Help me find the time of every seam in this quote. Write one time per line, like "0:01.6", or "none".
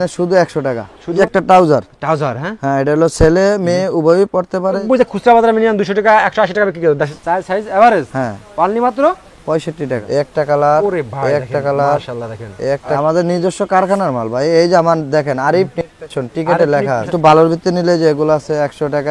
0:01.2
0:04.8
0:07.1
0:10.0
0:13.0
0:17.1